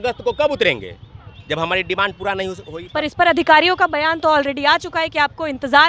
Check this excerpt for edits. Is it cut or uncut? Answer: uncut